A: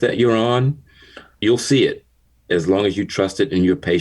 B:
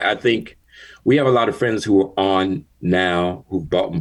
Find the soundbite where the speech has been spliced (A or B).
A